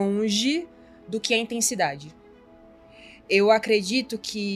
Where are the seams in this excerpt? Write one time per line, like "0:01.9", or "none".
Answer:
none